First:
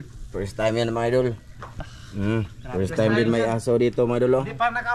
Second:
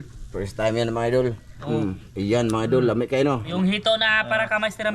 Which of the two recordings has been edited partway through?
second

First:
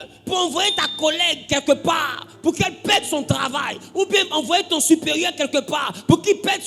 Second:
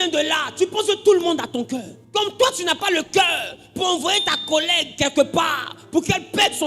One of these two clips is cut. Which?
second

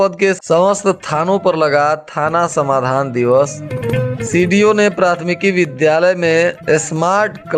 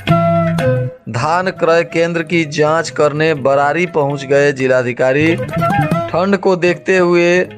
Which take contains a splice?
second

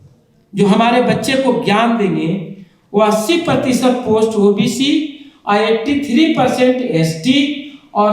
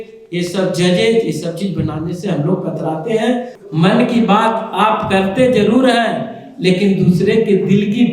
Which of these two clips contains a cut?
second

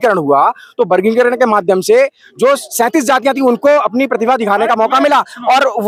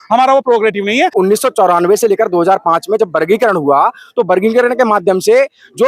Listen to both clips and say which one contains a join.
second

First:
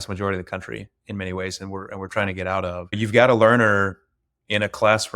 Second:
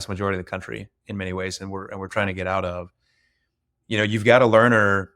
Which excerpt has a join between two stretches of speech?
first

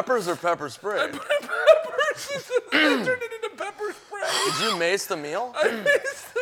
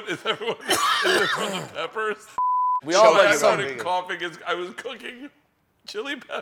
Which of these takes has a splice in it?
second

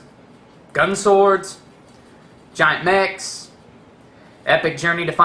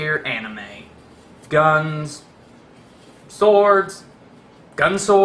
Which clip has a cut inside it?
first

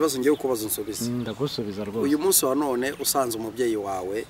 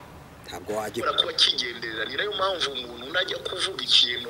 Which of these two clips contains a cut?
second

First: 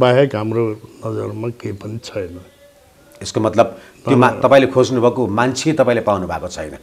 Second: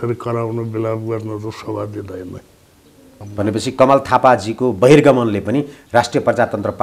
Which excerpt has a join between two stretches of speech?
second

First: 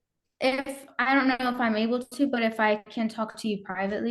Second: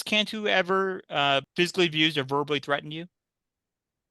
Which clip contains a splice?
second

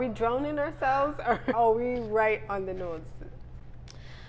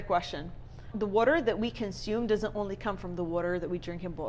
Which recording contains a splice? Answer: first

